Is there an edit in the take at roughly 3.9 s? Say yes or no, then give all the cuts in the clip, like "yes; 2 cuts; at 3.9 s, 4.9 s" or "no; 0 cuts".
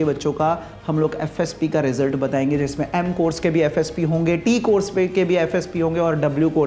no; 0 cuts